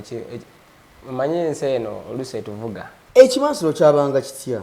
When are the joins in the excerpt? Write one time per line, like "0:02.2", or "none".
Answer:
0:02.9

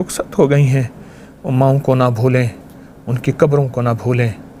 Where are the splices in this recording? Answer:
none

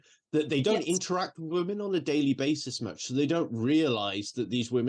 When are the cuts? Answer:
none

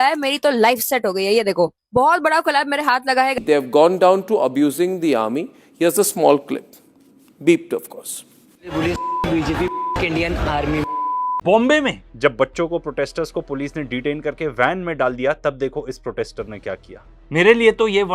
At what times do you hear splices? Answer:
0:03.4
0:11.4

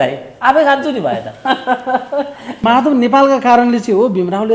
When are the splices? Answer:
0:02.6

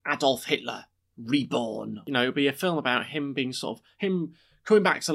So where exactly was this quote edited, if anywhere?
0:02.0

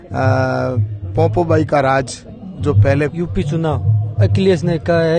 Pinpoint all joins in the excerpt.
0:03.1

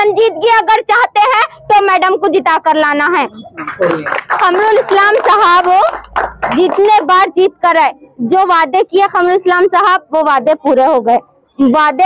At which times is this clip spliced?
none

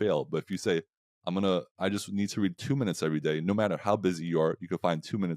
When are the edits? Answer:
none

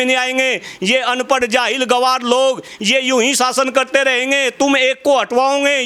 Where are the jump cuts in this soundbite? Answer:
none

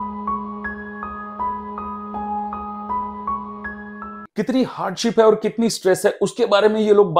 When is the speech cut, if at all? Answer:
0:04.2

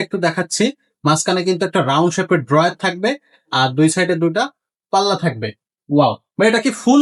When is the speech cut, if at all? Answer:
none

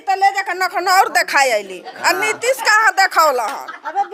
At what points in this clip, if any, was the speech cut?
none

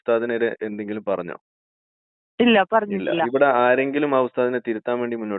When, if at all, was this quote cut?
0:03.4

